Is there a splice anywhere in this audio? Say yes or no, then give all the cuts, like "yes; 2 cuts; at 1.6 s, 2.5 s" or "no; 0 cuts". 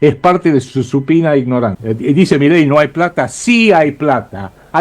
yes; 1 cut; at 1.8 s